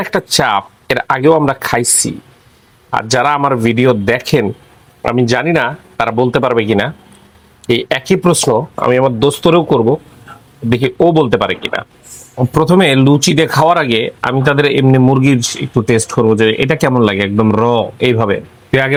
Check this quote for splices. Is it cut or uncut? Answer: uncut